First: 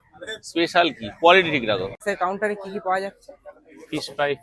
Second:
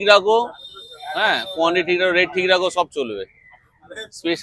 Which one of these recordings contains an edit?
first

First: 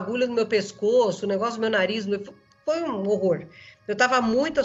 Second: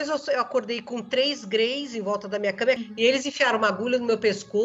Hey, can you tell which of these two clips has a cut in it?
second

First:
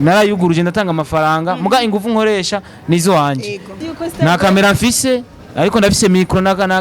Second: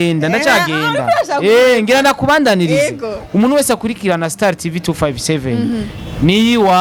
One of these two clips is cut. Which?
first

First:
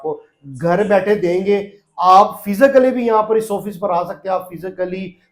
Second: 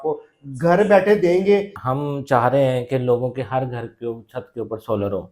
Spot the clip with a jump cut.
second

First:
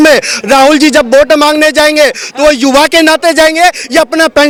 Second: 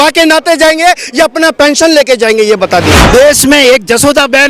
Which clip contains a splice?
second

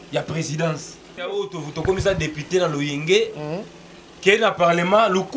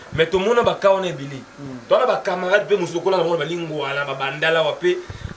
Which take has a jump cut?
first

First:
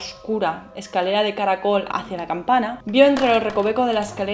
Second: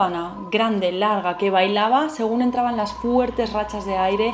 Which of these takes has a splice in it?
first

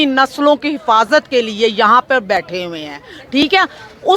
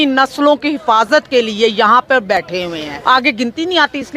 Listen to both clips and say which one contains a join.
second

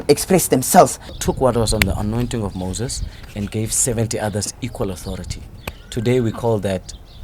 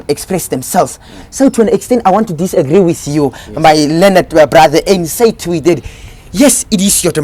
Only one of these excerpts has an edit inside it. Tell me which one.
first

